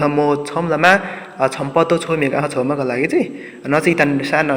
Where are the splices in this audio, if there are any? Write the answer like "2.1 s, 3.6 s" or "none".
none